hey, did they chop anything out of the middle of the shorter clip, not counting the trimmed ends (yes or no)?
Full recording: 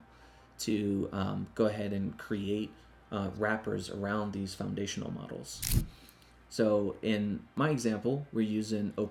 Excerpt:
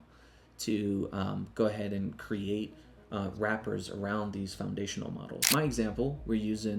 yes